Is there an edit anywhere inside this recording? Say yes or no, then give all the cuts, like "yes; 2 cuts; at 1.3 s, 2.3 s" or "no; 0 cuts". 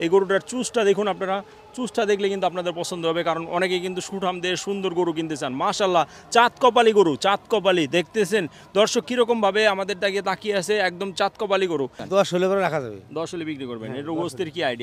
yes; 1 cut; at 12.0 s